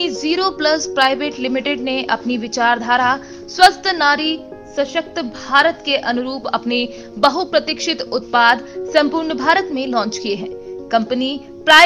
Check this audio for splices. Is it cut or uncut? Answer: uncut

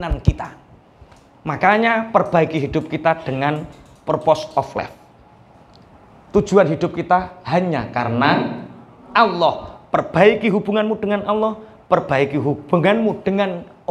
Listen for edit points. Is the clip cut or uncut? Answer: uncut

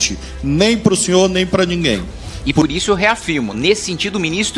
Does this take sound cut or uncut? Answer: cut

